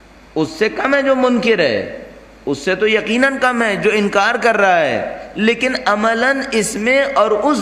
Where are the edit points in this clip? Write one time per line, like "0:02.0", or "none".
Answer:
0:04.9